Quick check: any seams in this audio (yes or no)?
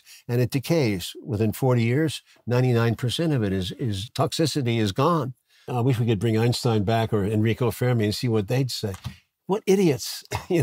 yes